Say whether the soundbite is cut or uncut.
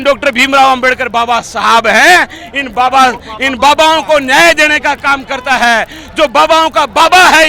uncut